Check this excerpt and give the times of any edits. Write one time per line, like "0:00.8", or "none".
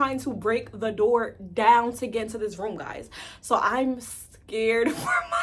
none